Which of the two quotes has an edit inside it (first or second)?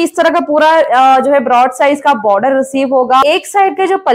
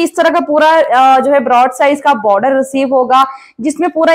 first